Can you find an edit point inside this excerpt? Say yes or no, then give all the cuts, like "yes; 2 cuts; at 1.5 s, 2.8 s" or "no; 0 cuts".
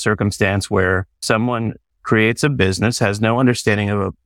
yes; 1 cut; at 1.1 s